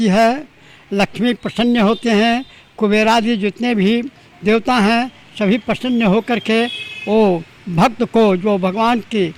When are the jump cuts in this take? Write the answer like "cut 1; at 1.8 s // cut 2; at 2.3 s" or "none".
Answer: none